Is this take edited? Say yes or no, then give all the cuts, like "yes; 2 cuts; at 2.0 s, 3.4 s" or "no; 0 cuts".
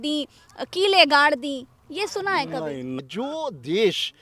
yes; 1 cut; at 3.0 s